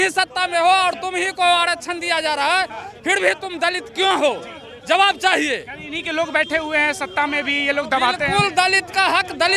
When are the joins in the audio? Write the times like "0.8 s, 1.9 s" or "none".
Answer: none